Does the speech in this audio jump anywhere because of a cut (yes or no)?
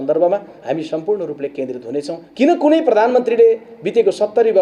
yes